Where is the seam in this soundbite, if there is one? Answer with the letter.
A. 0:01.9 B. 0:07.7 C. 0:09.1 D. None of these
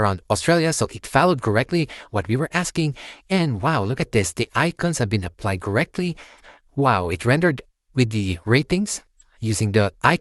D